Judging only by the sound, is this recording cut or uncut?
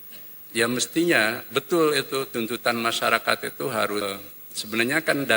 cut